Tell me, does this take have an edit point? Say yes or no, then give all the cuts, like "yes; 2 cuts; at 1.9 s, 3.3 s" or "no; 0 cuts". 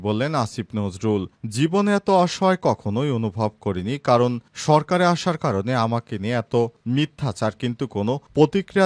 no; 0 cuts